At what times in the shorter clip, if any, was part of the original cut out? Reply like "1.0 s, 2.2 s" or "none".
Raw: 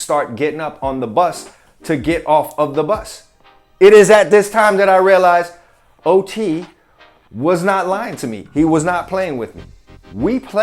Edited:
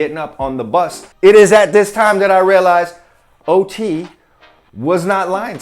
1.0 s